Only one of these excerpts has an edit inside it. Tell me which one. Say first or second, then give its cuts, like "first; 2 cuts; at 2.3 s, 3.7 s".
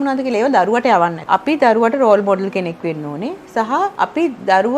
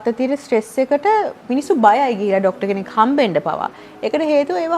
first; 2 cuts; at 1.3 s, 3.9 s